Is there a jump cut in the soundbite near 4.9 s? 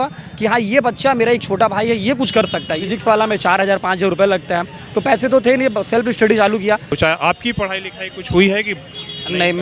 no; 2 cuts; at 2.8 s, 7.0 s

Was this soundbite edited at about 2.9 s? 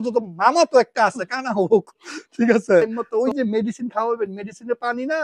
yes; 1 cut; at 2.9 s

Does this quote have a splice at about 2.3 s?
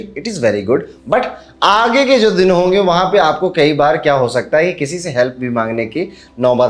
no; 0 cuts

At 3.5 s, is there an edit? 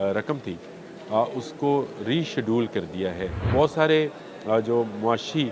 yes; 1 cut; at 3.5 s

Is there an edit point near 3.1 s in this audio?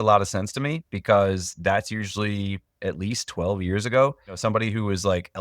no; 1 cut; at 4.4 s

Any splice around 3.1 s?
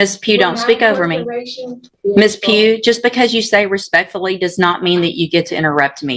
no; 1 cut; at 1.9 s

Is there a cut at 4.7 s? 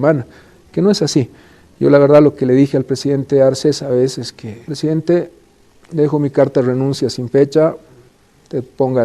yes; 1 cut; at 4.7 s

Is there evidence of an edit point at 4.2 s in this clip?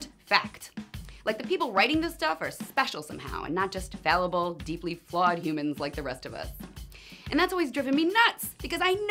yes; 1 cut; at 4.2 s

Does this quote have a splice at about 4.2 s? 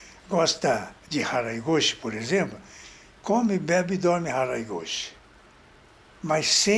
no; 0 cuts

